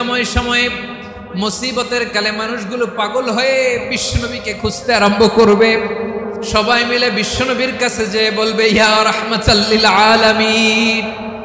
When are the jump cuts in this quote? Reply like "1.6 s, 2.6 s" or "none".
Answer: 6.5 s